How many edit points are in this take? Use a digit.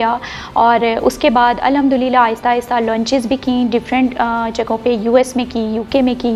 0